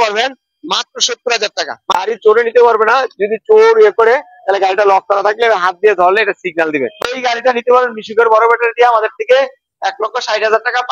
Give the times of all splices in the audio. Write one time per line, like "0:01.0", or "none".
0:01.9
0:07.0